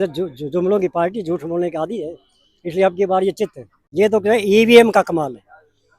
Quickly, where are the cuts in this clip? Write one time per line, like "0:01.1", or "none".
0:03.8